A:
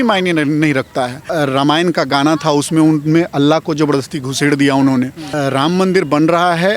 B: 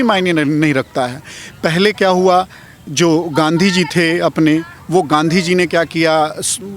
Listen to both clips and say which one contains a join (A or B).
A